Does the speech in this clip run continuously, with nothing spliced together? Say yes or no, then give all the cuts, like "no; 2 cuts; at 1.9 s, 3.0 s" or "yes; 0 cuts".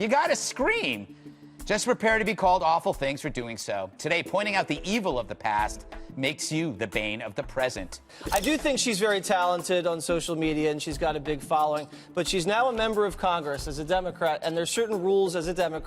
no; 1 cut; at 8.0 s